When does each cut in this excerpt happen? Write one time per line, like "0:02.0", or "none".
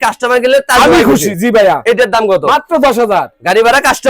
none